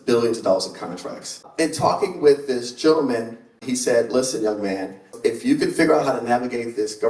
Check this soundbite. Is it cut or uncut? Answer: cut